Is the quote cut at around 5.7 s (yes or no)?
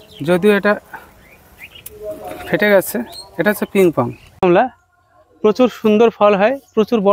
no